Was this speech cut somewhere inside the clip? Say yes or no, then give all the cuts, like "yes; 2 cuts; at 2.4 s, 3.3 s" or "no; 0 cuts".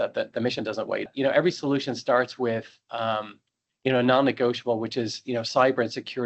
yes; 1 cut; at 1.1 s